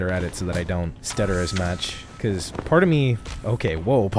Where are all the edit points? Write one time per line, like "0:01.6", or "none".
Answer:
0:01.0